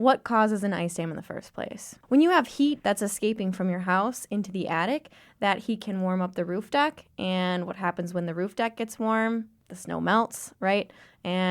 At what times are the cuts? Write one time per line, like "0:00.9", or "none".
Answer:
0:02.0